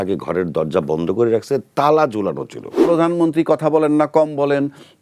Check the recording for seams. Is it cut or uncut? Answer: cut